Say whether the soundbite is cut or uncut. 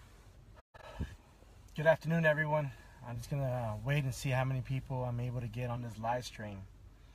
uncut